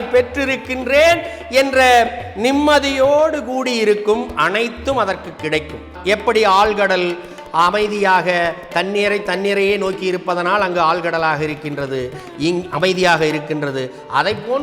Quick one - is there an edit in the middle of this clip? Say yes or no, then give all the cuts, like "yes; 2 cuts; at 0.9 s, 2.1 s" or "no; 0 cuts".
yes; 1 cut; at 5.9 s